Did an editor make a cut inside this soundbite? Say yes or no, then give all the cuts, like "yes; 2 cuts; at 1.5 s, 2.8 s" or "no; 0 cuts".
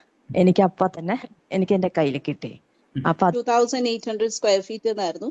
yes; 1 cut; at 3.3 s